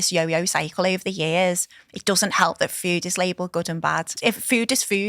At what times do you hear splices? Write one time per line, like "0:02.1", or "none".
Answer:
0:04.1